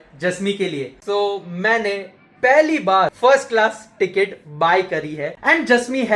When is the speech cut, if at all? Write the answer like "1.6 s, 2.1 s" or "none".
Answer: 1.0 s, 3.1 s, 5.4 s